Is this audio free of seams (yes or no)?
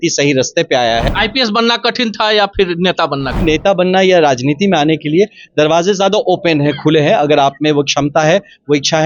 no